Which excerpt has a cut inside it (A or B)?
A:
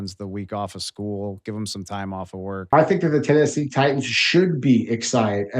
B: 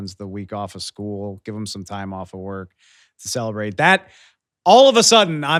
A